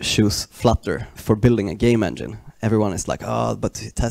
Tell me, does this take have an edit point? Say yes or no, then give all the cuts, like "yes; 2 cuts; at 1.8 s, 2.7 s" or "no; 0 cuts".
yes; 1 cut; at 1.1 s